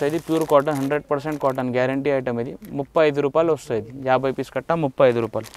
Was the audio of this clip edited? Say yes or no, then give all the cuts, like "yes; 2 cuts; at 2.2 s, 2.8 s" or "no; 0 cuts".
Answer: no; 0 cuts